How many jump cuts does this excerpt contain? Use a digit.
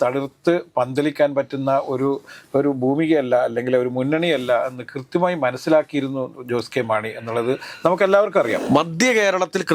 1